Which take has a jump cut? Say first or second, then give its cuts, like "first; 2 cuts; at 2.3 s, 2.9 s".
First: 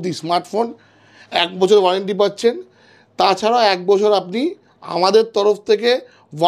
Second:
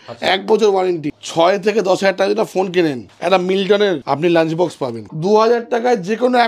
second; 4 cuts; at 1.1 s, 3.1 s, 4.0 s, 5.1 s